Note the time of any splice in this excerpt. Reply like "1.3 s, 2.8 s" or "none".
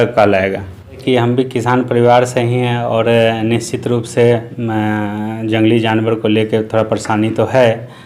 1.0 s